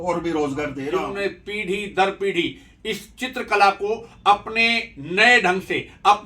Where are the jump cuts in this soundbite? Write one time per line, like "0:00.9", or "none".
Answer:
0:01.0